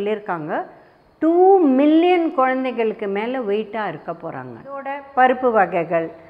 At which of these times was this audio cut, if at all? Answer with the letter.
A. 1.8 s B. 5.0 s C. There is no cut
B